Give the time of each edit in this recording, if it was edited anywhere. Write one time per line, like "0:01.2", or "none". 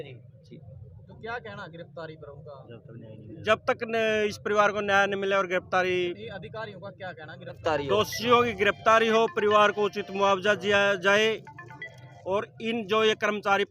0:07.6